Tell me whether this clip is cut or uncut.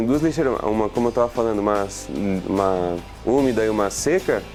uncut